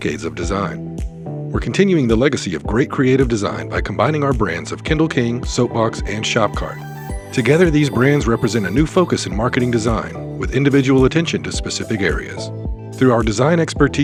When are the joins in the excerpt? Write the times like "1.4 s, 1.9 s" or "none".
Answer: none